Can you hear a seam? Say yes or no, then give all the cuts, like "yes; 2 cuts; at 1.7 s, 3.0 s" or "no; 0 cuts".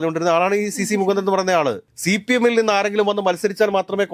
yes; 1 cut; at 1.8 s